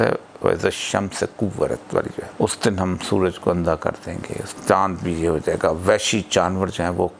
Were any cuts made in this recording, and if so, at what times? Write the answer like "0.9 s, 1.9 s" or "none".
2.2 s, 4.4 s